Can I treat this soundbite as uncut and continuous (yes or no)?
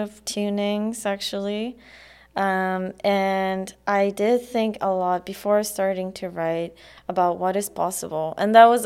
yes